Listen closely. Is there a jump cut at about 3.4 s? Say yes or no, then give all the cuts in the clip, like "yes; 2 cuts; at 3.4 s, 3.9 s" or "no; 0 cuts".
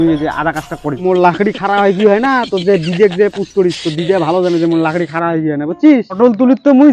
no; 2 cuts; at 1.0 s, 6.2 s